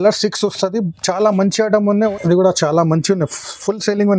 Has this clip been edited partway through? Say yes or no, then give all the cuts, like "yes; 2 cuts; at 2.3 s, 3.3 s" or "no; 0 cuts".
yes; 1 cut; at 2.1 s